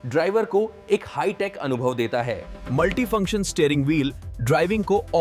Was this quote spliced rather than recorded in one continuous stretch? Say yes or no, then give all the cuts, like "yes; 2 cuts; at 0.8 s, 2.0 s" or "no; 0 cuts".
yes; 1 cut; at 2.5 s